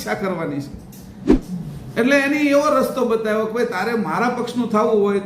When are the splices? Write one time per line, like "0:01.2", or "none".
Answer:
0:01.1

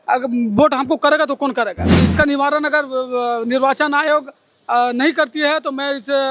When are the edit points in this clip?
0:02.0

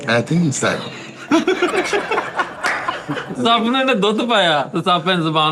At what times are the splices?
0:03.3

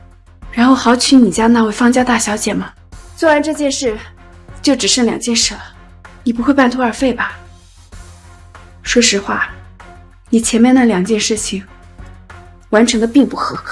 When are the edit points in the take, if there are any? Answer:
0:07.3
0:08.9

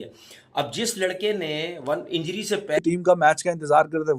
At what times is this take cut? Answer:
0:02.8

